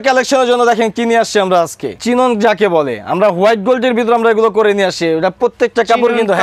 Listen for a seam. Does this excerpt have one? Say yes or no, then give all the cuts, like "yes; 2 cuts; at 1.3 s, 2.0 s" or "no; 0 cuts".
yes; 1 cut; at 2.0 s